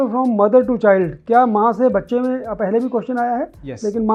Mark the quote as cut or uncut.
uncut